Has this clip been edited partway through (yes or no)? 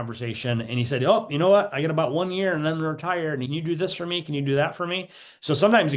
yes